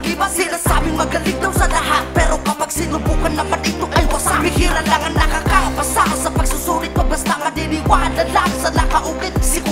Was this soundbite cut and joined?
no; 0 cuts

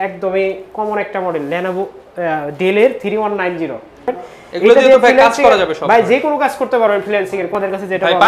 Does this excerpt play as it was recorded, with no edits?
no; 2 cuts; at 4.1 s, 7.5 s

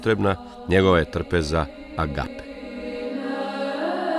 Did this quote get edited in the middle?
yes; 1 cut; at 2.4 s

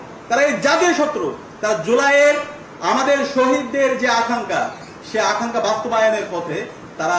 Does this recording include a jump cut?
no; 0 cuts

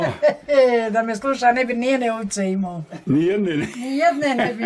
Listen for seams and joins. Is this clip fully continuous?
yes; 0 cuts

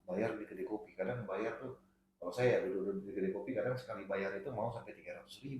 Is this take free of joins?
yes; 0 cuts

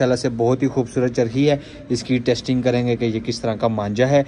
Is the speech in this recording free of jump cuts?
yes; 0 cuts

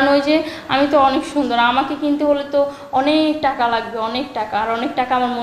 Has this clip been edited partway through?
no; 0 cuts

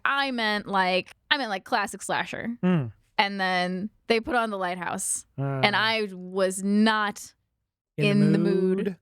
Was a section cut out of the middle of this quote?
yes; 2 cuts; at 1.2 s, 3.9 s

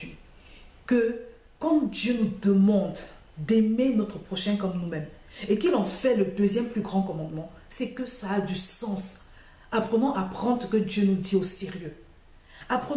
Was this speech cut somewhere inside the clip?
no; 0 cuts

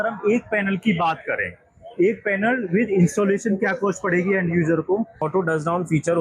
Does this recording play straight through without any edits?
no; 1 cut; at 5.3 s

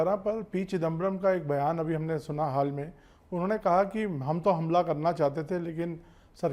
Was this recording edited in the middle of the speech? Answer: no; 0 cuts

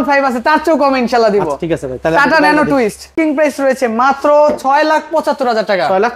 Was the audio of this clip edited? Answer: yes; 1 cut; at 3.1 s

